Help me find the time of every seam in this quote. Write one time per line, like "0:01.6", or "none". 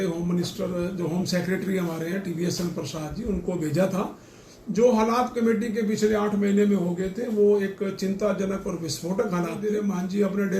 0:09.6